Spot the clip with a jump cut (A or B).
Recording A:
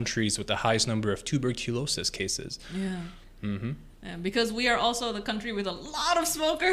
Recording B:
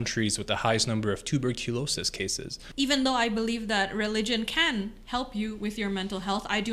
B